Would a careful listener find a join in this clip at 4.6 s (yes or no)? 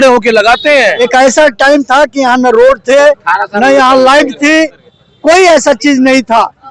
no